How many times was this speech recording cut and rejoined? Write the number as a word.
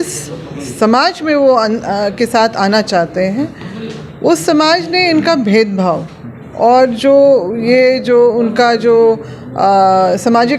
zero